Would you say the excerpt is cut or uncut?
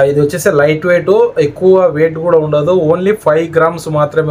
uncut